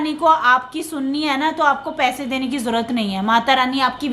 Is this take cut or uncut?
uncut